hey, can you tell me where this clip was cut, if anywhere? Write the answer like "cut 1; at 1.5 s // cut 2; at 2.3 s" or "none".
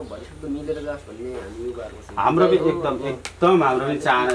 none